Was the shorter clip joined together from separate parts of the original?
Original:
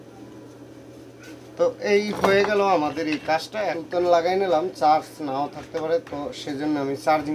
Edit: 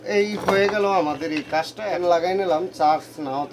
yes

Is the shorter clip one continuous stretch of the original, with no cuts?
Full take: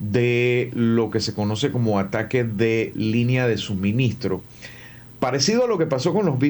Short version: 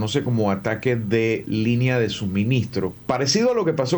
no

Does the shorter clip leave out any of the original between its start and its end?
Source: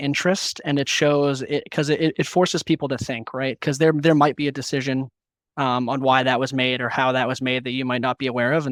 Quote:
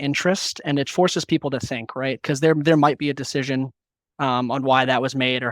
yes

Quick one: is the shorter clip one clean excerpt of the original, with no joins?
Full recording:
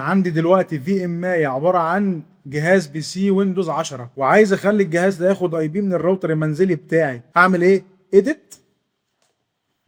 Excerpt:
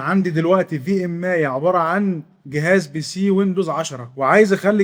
yes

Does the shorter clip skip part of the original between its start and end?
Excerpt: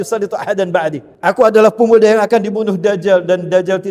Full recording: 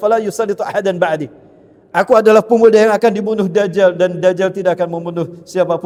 yes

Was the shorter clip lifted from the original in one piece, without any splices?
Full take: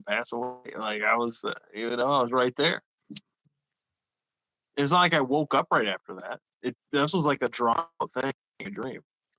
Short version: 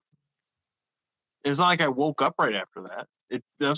yes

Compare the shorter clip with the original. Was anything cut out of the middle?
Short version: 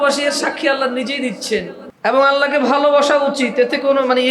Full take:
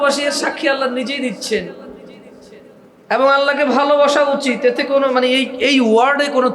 yes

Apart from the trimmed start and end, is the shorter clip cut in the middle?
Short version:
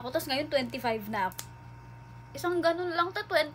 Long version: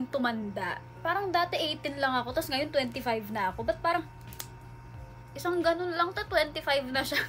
yes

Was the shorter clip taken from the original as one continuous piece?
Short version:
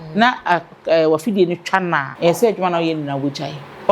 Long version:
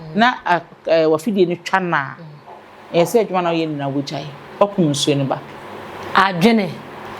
no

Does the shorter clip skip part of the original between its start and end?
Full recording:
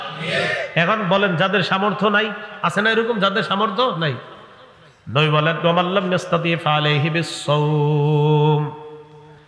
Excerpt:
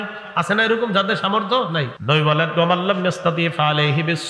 yes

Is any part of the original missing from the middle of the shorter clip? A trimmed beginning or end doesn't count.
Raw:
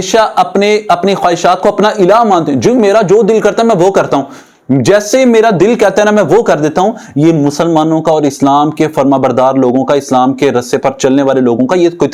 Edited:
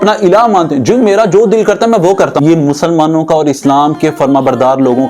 yes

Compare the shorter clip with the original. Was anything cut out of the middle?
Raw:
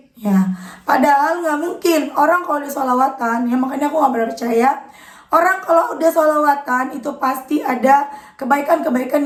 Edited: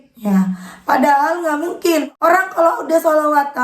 yes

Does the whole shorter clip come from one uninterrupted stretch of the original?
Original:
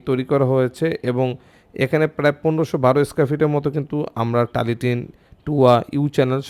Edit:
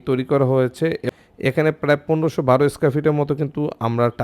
no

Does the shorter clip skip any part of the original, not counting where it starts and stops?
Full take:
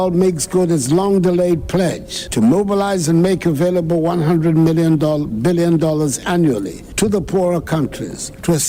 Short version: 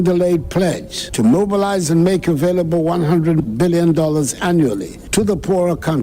yes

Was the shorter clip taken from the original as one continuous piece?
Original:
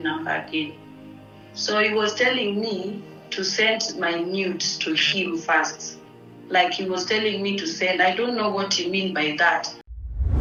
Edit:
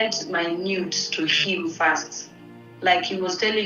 yes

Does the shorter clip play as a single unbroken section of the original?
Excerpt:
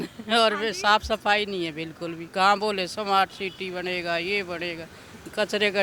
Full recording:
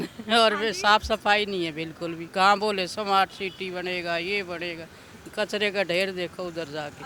yes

